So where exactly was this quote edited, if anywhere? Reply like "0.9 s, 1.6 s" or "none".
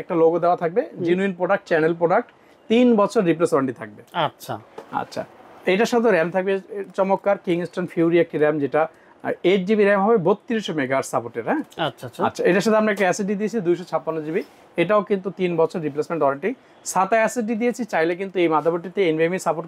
none

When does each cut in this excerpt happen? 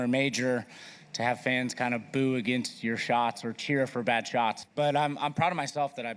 none

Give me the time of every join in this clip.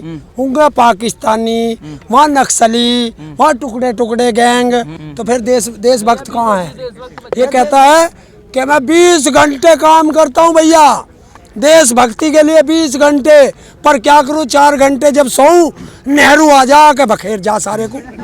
5.0 s, 7.2 s

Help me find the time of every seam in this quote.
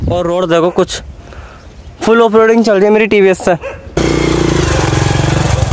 3.9 s

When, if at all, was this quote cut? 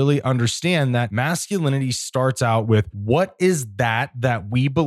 1.1 s, 2.9 s

